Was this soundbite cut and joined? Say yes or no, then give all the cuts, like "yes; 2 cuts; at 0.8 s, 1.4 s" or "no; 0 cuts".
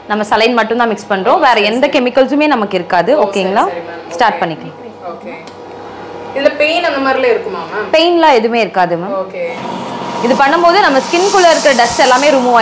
no; 0 cuts